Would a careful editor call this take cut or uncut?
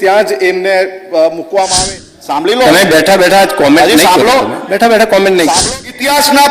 cut